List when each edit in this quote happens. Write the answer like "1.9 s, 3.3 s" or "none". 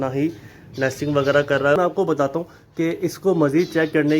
1.8 s